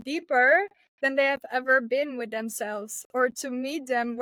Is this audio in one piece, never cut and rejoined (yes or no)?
yes